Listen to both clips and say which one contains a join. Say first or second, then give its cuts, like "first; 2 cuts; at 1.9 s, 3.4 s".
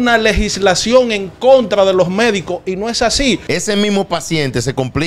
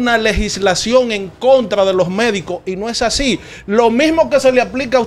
first; 1 cut; at 3.4 s